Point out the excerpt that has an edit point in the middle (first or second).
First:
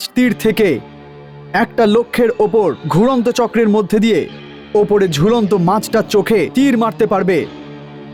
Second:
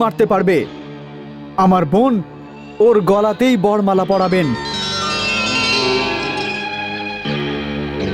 second